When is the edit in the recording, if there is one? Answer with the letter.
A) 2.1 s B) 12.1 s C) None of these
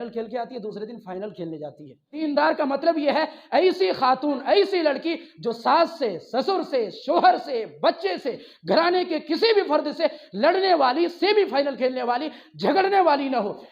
A